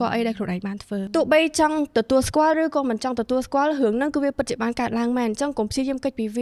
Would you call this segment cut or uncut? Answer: cut